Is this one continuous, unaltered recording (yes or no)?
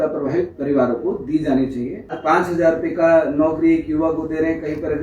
no